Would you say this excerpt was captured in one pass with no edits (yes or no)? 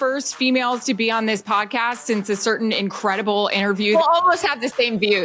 no